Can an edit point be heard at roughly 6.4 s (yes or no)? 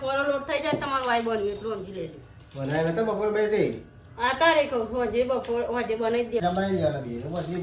yes